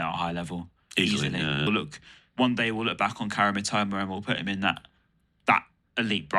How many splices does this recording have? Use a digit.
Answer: 1